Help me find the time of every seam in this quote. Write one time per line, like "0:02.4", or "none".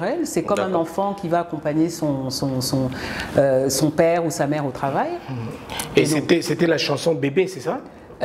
none